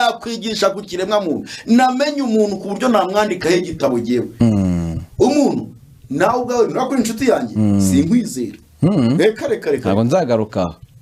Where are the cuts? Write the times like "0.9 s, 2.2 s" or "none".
none